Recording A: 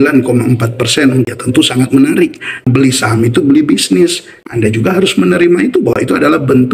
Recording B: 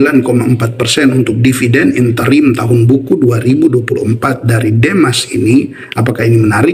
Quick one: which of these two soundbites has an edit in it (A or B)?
A